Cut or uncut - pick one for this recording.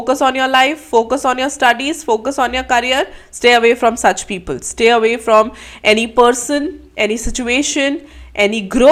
uncut